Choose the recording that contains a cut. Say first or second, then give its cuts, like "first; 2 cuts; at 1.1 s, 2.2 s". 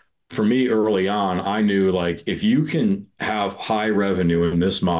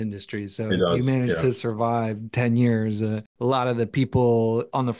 second; 1 cut; at 3.3 s